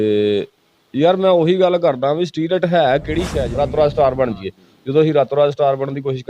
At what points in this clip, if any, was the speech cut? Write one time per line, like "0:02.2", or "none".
0:03.5

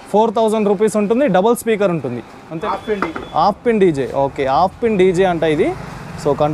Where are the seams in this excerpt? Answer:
0:02.6

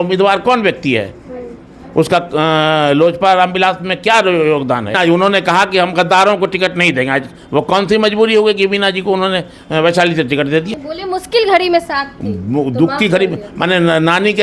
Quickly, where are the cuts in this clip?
0:05.0
0:10.8

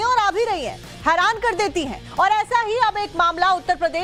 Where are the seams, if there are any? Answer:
none

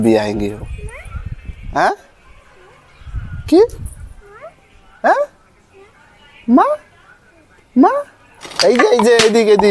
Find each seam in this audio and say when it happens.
none

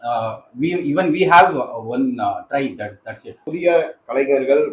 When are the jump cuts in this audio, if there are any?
0:03.5

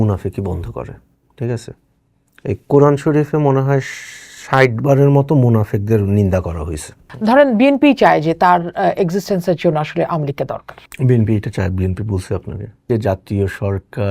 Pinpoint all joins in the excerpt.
0:07.0
0:12.9

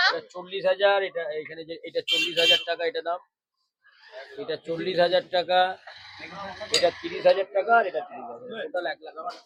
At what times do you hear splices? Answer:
none

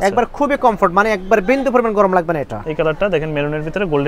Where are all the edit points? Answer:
0:02.6

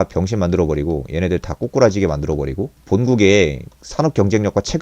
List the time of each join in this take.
0:02.8

